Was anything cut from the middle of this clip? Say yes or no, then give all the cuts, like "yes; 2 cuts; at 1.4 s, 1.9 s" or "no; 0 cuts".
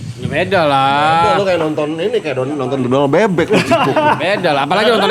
no; 0 cuts